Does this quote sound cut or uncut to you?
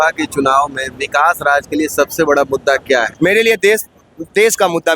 cut